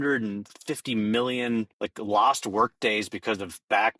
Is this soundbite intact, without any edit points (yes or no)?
no